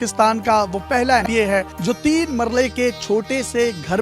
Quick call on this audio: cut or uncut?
cut